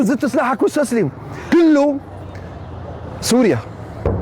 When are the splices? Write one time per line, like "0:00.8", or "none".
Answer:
0:01.3